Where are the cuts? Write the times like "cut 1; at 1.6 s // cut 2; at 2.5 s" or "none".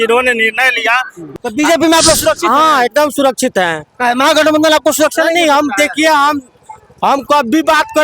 cut 1; at 1.3 s